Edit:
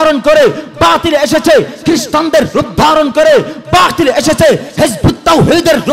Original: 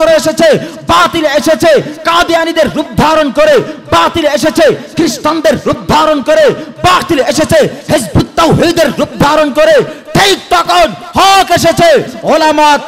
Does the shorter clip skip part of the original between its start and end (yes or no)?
no